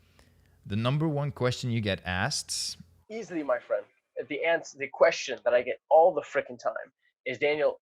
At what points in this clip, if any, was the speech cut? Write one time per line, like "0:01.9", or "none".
0:02.9